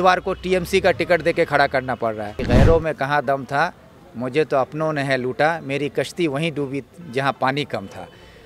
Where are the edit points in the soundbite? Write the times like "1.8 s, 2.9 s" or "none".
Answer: 2.4 s